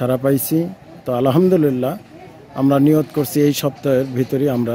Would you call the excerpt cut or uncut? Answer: uncut